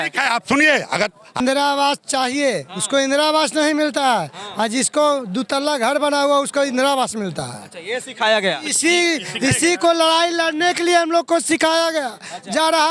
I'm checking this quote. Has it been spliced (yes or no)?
yes